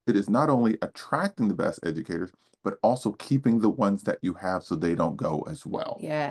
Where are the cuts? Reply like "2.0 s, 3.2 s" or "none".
none